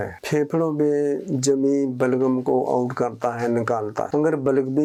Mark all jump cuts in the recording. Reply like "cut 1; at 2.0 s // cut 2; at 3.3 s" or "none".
none